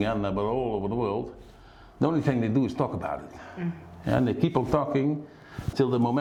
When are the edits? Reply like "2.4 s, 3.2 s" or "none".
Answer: none